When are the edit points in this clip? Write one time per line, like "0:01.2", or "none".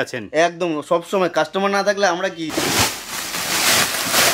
0:02.4